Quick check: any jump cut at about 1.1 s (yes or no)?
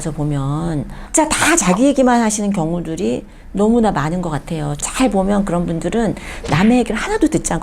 yes